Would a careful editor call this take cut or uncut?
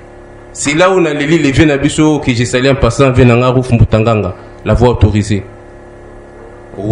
uncut